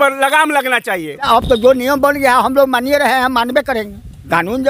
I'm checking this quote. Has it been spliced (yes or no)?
yes